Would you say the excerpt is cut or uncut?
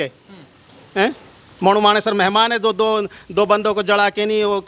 uncut